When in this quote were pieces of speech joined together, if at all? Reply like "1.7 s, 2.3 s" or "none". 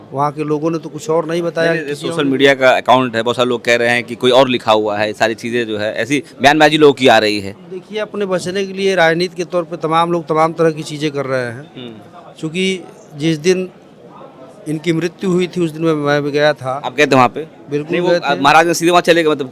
none